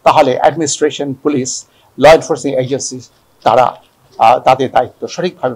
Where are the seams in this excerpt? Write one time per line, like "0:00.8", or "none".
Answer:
none